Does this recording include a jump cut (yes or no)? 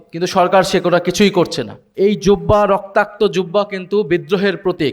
yes